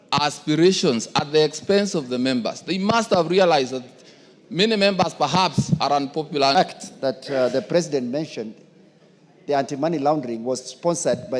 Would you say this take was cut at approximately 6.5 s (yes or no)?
yes